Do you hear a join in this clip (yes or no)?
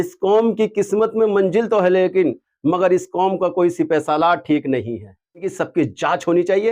yes